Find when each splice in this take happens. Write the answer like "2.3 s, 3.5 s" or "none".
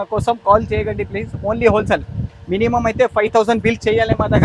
none

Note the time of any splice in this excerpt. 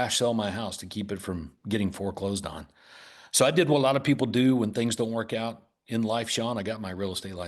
none

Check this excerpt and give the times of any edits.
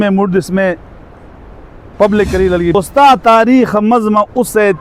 2.7 s

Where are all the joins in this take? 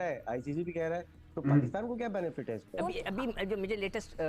2.7 s

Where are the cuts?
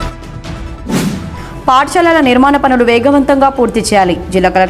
1.0 s

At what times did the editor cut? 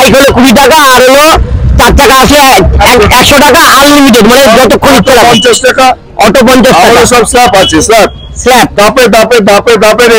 none

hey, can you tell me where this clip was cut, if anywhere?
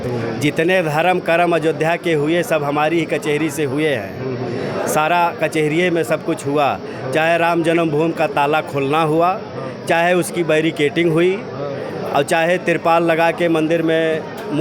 none

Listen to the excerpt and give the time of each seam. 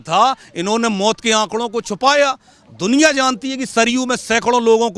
none

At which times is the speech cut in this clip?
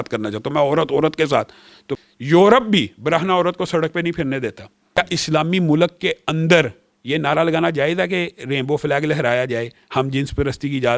1.9 s, 5.0 s

